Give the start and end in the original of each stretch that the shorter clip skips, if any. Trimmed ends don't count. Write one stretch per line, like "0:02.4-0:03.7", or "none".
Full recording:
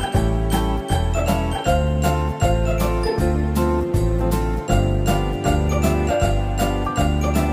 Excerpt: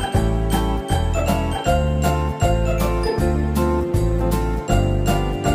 none